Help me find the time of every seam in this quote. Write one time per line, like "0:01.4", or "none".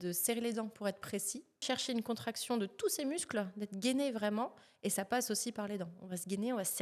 0:01.6